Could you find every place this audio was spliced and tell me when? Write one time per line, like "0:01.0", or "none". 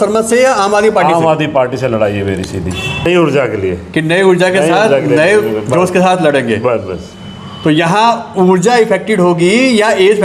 0:03.1